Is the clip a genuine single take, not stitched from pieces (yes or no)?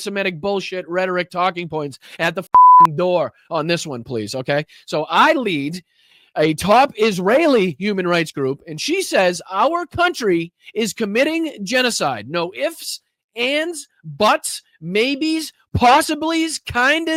yes